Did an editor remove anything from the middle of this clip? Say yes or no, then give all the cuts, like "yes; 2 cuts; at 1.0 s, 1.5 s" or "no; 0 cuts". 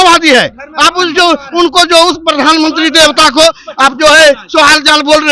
no; 0 cuts